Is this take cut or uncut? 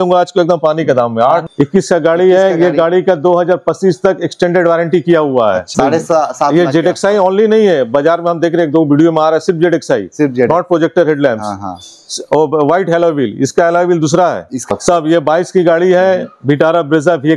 cut